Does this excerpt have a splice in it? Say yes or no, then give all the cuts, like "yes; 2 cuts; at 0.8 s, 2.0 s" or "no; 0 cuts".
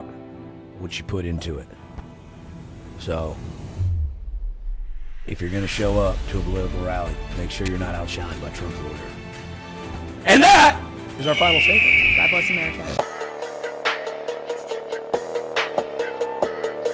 yes; 1 cut; at 12.9 s